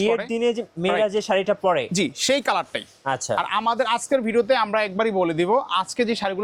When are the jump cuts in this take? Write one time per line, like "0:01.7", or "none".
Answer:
none